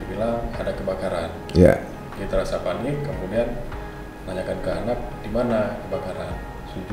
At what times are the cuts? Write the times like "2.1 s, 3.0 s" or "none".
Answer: none